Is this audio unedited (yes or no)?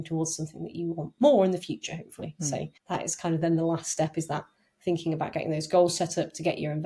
yes